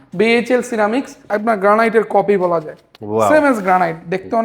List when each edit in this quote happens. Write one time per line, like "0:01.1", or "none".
0:01.3